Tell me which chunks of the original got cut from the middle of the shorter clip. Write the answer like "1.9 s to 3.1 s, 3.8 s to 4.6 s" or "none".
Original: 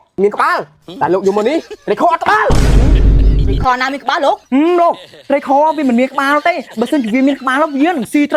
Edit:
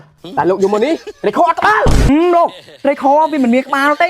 2.7 s to 4.5 s